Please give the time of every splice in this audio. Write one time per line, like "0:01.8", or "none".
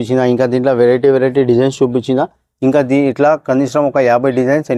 none